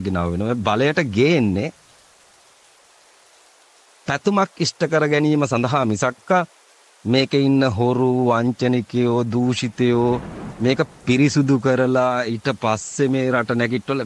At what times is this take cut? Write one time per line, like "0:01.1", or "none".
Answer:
none